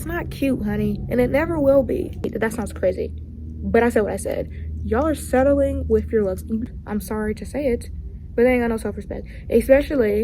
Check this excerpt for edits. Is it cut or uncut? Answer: cut